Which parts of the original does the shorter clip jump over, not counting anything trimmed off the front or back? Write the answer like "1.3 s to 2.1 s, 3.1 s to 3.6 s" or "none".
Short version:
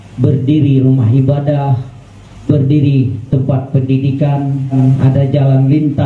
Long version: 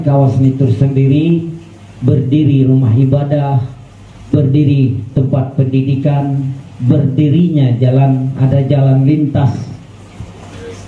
6.6 s to 8.1 s